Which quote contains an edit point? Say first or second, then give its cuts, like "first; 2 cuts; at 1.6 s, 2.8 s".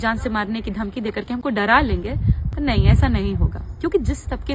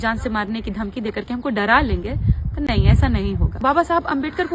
second; 1 cut; at 3.6 s